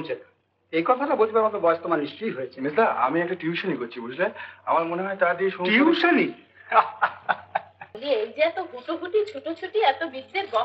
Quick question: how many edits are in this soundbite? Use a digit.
1